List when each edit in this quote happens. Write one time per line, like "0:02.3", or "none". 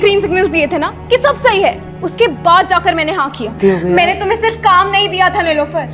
0:03.6